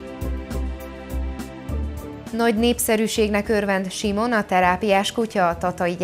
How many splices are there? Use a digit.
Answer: 0